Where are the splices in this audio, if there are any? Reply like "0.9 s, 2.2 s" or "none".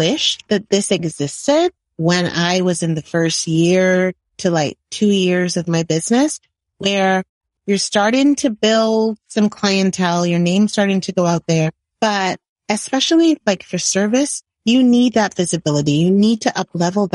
7.4 s, 11.8 s